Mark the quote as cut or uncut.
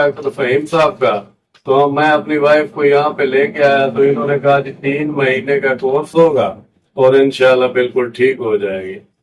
uncut